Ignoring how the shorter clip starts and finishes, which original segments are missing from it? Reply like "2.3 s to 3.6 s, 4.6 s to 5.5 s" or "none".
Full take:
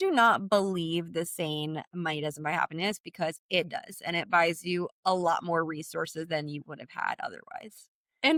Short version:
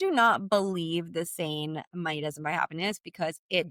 none